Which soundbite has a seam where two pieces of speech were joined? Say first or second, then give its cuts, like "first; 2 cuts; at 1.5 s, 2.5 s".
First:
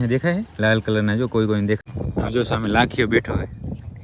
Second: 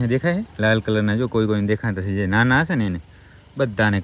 first; 1 cut; at 1.9 s